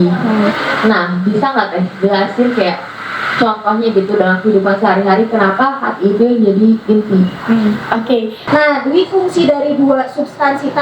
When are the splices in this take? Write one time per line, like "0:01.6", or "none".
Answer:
0:08.4

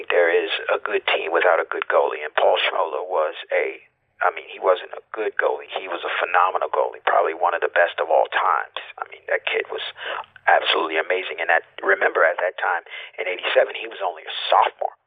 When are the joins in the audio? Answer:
none

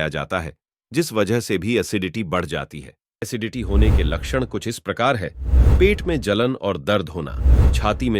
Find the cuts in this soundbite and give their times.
0:03.3

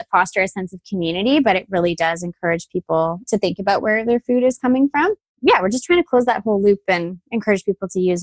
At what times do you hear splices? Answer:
0:05.3

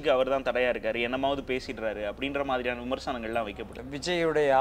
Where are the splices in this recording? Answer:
0:03.7

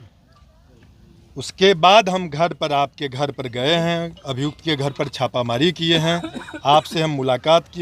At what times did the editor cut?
none

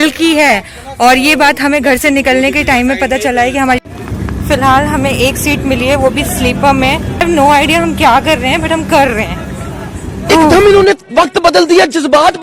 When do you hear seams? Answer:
0:03.8
0:07.2
0:10.5

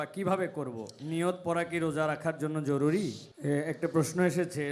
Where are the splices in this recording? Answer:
0:03.3

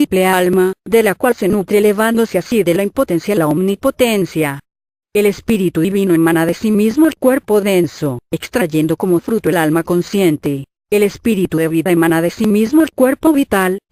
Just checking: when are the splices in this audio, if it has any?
none

